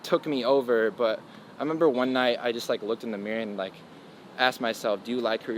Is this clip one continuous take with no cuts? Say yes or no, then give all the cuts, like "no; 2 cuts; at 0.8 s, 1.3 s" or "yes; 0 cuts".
yes; 0 cuts